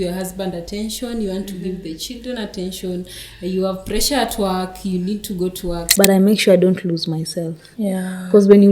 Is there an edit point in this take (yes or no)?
yes